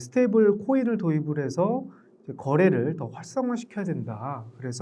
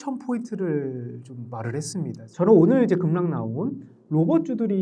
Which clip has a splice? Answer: second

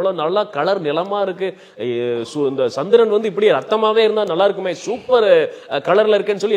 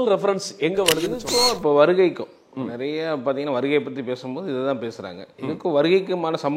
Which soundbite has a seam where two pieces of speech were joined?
second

